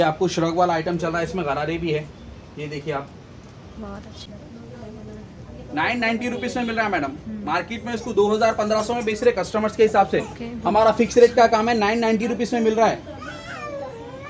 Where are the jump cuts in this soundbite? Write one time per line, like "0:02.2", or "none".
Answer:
0:04.2